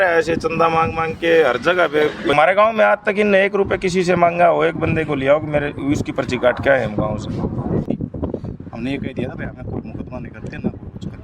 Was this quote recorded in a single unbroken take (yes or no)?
no